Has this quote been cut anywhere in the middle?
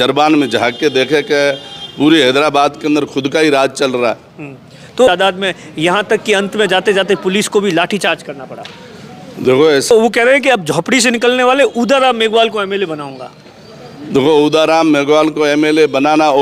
yes; 2 cuts; at 5.1 s, 9.9 s

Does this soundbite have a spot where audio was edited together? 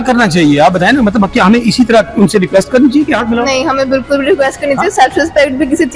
no; 0 cuts

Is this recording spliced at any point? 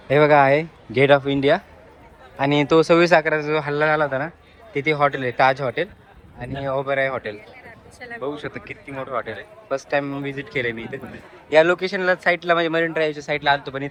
no; 0 cuts

